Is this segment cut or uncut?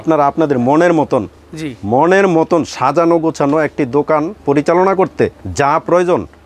uncut